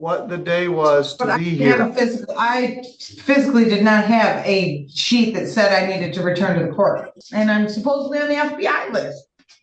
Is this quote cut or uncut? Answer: cut